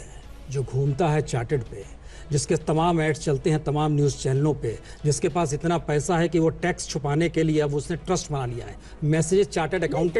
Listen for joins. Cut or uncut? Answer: uncut